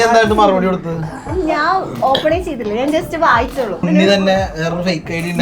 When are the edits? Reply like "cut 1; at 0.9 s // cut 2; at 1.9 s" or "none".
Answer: cut 1; at 3.9 s